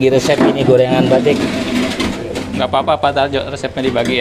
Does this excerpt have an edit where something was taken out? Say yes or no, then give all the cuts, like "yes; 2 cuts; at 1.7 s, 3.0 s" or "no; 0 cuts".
no; 0 cuts